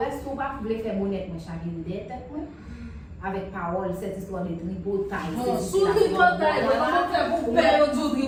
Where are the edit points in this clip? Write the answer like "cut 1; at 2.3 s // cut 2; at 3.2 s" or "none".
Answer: none